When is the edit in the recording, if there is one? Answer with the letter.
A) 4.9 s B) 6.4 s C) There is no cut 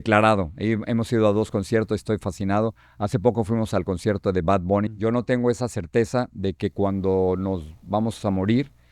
A